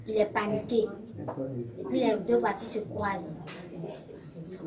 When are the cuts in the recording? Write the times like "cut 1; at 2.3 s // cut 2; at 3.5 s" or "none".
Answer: none

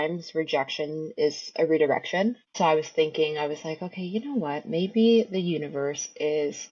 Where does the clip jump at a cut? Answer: none

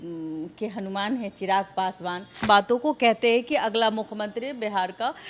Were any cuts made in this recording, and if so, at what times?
cut 1; at 2.4 s

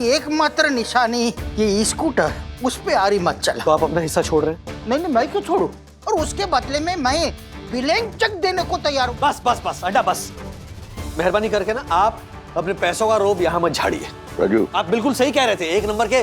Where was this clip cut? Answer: cut 1; at 3.6 s // cut 2; at 5.9 s // cut 3; at 9.1 s // cut 4; at 14.5 s

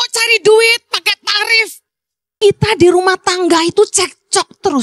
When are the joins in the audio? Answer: cut 1; at 2.4 s

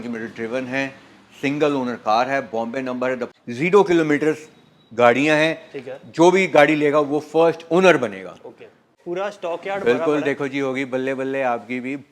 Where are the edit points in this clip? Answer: cut 1; at 3.3 s // cut 2; at 8.9 s

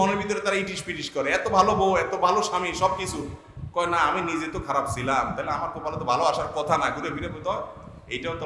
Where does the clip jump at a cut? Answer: none

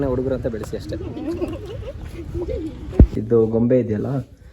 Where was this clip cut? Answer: cut 1; at 3.2 s

